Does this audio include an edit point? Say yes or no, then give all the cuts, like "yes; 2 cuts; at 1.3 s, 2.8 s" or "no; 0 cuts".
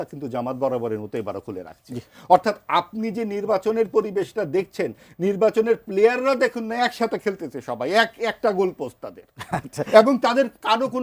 no; 0 cuts